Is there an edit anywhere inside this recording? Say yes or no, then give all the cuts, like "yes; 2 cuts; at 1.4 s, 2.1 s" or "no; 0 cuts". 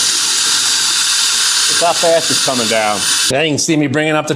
yes; 1 cut; at 3.1 s